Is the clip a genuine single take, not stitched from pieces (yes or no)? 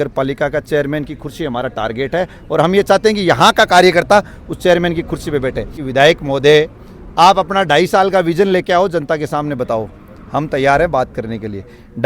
no